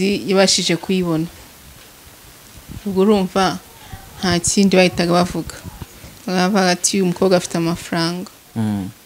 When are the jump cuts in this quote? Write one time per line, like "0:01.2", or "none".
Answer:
none